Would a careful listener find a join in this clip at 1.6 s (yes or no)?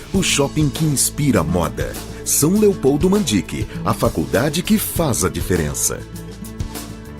no